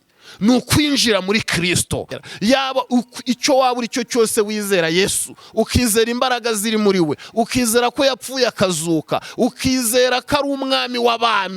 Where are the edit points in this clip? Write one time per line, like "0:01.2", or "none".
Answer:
0:02.2